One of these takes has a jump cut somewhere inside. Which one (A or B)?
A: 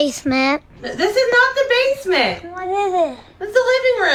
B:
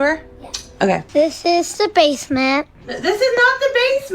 B